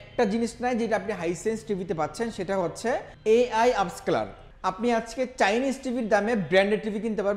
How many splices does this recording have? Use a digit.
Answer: 2